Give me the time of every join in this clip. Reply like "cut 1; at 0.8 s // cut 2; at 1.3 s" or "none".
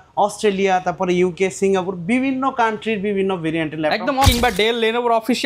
cut 1; at 4.3 s

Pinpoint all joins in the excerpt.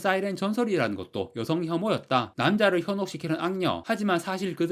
cut 1; at 2.3 s

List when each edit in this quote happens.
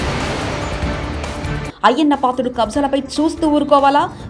cut 1; at 1.5 s

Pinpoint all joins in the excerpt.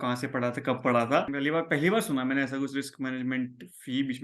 cut 1; at 1.3 s

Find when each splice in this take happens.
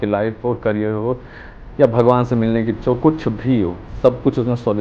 none

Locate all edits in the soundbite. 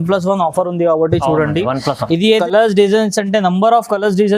cut 1; at 2.4 s

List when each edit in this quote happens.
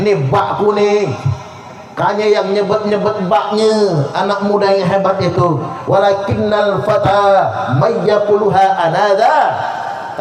none

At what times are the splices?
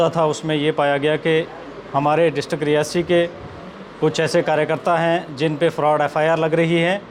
none

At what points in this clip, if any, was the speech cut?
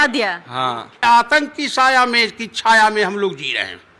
cut 1; at 1.0 s

